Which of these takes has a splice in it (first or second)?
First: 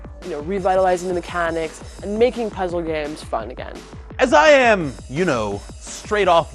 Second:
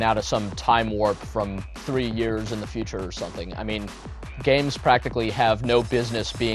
first